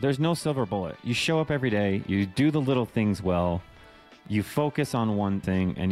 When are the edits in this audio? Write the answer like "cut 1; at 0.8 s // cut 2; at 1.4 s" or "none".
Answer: cut 1; at 1.0 s